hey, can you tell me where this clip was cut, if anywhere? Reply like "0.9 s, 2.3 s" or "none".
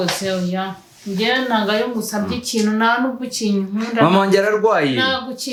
none